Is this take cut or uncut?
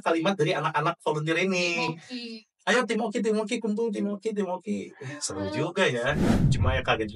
cut